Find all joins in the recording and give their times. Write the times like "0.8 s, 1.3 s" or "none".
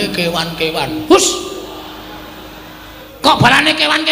3.0 s